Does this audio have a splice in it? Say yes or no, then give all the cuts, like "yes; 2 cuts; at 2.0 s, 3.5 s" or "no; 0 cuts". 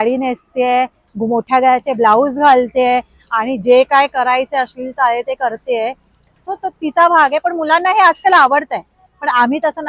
no; 0 cuts